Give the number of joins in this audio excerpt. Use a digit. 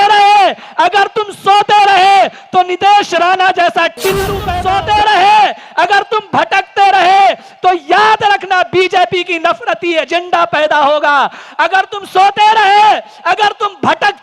1